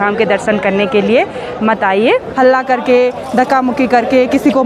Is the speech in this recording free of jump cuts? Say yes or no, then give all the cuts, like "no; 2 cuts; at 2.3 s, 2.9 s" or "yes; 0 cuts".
no; 1 cut; at 2.3 s